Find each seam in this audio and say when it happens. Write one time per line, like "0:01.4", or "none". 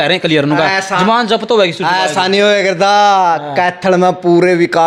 none